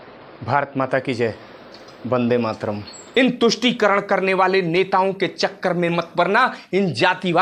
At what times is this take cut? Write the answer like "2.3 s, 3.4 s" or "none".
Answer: 3.0 s